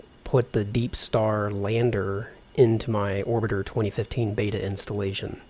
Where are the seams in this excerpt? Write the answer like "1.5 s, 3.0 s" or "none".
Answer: none